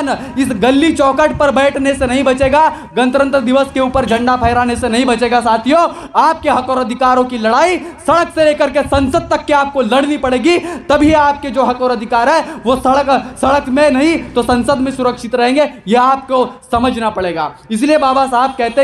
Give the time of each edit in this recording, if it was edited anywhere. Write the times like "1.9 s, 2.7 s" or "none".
none

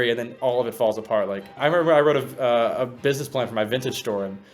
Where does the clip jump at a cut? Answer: 1.6 s

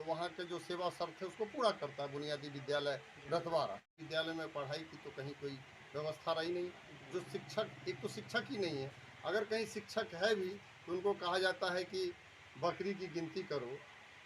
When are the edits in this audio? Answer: 4.0 s

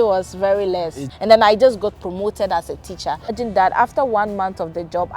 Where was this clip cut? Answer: 1.1 s, 3.4 s

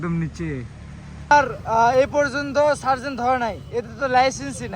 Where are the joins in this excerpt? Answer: 1.3 s

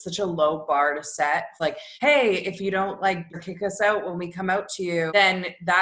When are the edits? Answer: 1.7 s, 3.3 s, 5.1 s

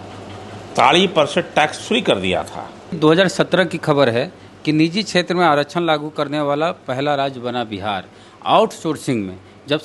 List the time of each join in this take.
3.0 s

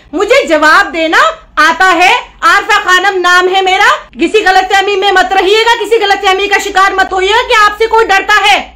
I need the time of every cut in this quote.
4.1 s

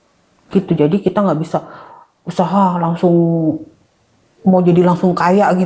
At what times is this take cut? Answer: none

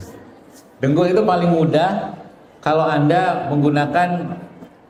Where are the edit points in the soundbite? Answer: none

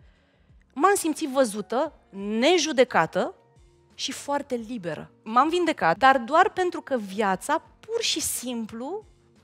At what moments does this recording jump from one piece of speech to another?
5.1 s, 6.0 s

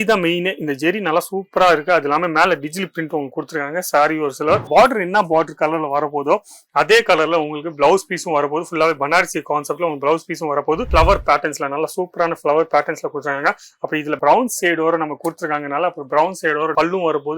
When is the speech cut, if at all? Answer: 4.7 s, 10.9 s

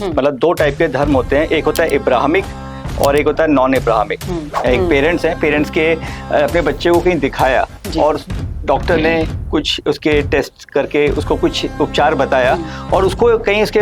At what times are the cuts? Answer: 4.5 s

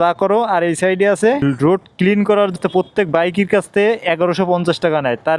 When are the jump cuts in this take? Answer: 1.5 s, 2.6 s

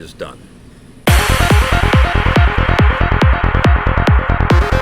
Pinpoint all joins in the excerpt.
1.0 s

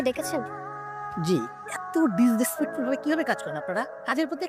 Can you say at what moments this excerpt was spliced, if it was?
none

